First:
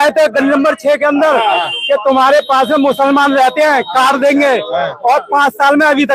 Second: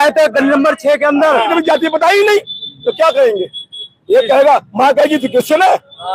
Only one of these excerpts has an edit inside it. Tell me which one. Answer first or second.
second